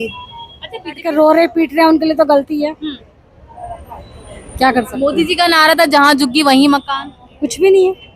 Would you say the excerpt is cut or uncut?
cut